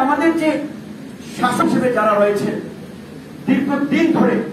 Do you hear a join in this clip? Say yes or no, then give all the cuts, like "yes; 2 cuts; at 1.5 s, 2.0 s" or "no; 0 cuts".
yes; 1 cut; at 1.6 s